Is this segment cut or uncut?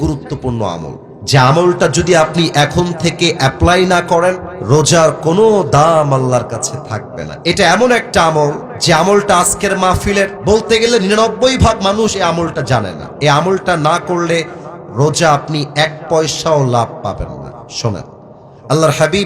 cut